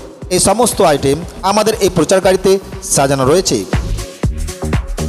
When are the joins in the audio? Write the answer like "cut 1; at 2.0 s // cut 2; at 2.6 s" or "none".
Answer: cut 1; at 3.6 s